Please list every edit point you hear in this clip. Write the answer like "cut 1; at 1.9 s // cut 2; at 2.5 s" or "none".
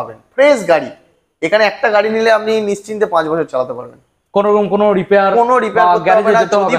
none

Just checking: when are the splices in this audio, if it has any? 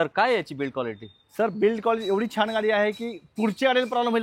none

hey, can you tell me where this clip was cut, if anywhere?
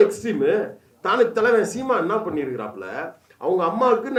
none

